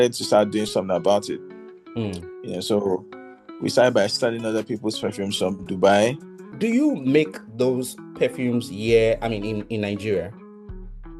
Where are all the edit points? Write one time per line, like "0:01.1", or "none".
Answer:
0:06.5